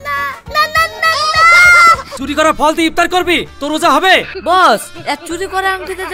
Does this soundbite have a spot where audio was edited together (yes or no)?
yes